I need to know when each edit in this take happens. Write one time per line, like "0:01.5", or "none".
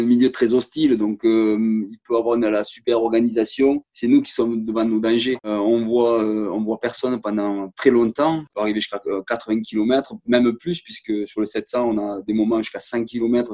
0:08.5